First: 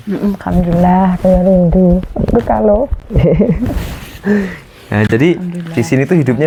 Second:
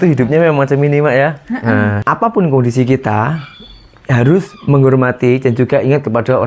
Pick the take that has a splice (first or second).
second